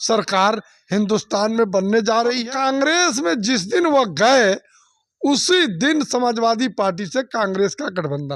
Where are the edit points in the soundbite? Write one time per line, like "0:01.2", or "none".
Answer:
0:02.4